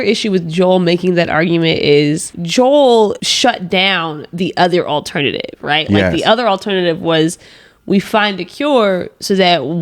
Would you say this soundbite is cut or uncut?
cut